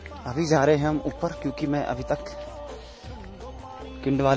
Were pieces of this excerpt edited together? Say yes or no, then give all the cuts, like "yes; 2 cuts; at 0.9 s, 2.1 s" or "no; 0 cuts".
no; 0 cuts